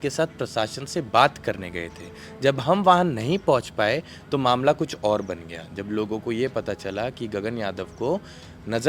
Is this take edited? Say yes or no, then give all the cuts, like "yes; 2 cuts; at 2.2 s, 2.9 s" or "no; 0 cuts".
no; 0 cuts